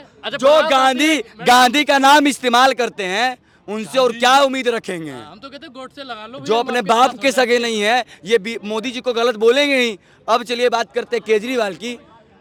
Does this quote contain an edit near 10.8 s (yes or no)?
no